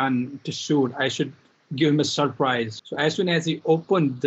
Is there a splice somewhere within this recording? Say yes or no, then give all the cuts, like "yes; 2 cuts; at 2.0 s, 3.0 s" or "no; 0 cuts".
yes; 1 cut; at 2.8 s